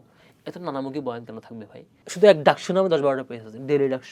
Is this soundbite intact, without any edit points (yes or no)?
no